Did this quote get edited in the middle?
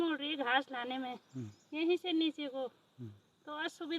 no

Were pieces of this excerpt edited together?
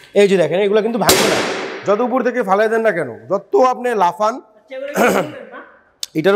no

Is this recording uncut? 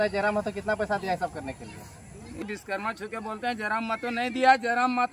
no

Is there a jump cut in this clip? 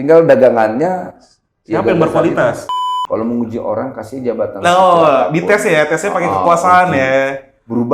yes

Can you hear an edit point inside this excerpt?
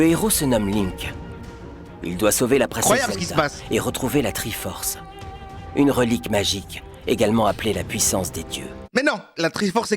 yes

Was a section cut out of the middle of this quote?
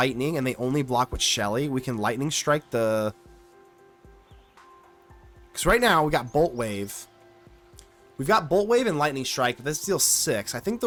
no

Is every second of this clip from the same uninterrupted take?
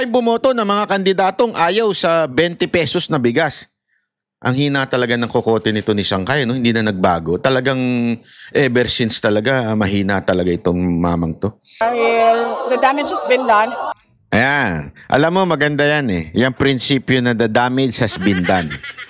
no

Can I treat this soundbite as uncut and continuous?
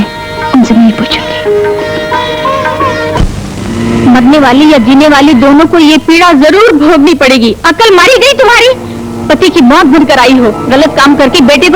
no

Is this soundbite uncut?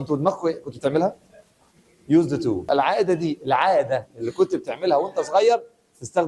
no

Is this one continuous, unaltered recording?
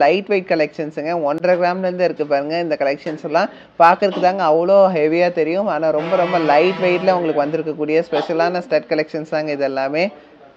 yes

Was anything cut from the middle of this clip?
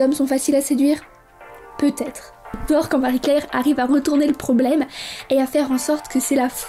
yes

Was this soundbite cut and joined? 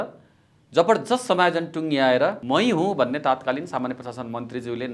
yes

